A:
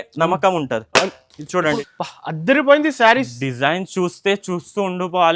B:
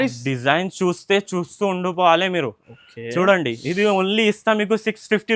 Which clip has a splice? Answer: A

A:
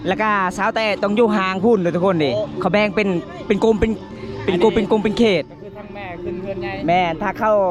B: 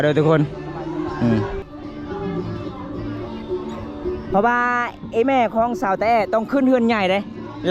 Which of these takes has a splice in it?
B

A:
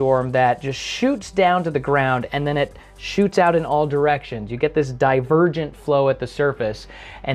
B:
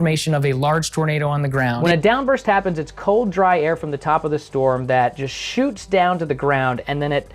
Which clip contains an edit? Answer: B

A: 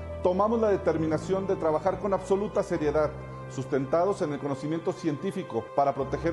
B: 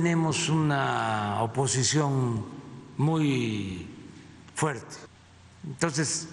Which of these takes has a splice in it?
B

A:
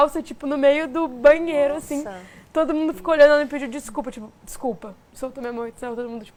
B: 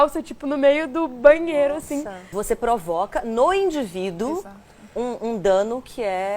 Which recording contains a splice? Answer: B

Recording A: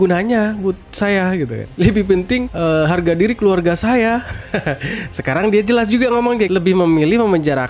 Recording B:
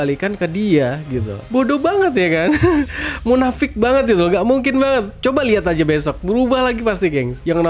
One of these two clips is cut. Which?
A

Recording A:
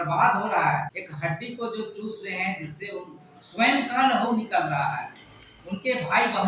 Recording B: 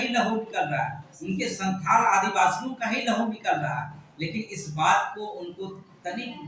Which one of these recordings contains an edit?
A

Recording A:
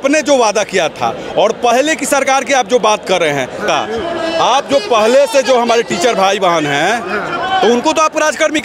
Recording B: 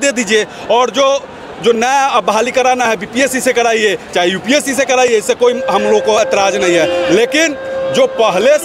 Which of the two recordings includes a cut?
A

